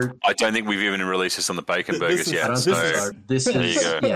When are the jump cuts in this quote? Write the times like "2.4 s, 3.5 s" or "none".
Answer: 3.1 s